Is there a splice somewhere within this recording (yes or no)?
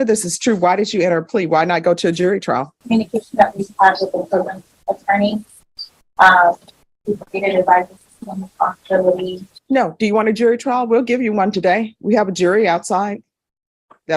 yes